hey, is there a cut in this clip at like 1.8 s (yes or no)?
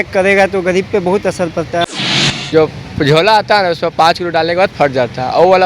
yes